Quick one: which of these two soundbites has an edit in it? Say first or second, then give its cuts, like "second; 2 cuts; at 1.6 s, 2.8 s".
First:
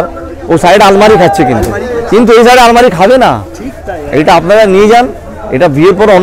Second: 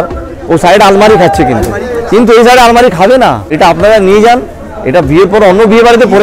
second; 1 cut; at 3.5 s